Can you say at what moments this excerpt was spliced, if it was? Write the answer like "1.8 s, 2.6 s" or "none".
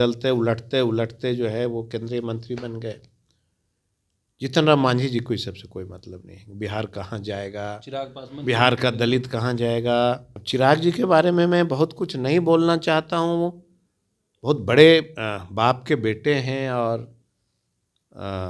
10.3 s